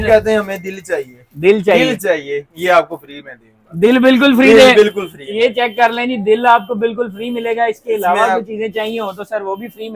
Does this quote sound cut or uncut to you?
uncut